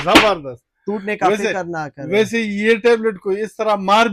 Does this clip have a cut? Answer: no; 0 cuts

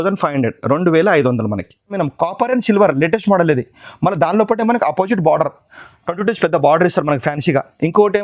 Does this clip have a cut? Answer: yes; 1 cut; at 2.1 s

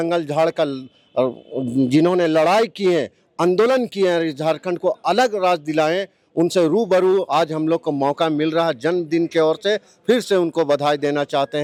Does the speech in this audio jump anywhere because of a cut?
no; 0 cuts

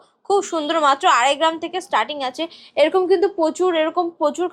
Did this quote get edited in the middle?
no; 0 cuts

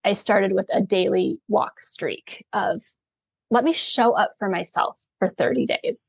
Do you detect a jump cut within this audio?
no; 0 cuts

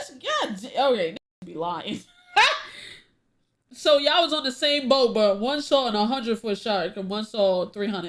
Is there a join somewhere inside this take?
no; 0 cuts

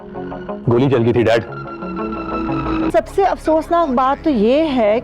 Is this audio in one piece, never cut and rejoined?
no; 1 cut; at 2.9 s

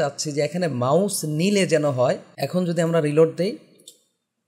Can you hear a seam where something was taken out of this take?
yes; 1 cut; at 2.3 s

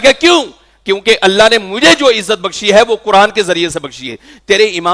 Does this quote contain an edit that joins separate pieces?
no; 0 cuts

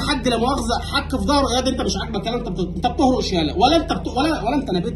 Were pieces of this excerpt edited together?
no; 0 cuts

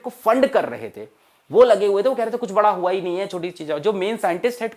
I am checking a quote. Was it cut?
no; 0 cuts

